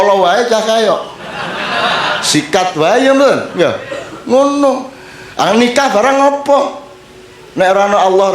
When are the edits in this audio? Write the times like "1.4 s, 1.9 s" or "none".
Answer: none

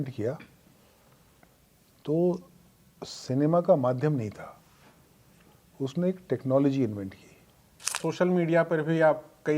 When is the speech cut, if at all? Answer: 8.0 s

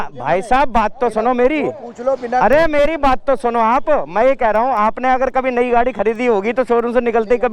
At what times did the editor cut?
none

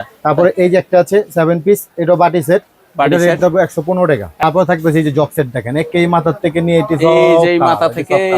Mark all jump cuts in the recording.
4.4 s

